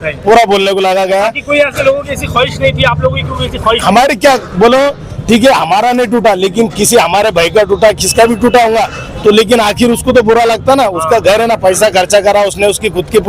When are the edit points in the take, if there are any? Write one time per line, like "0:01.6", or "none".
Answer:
none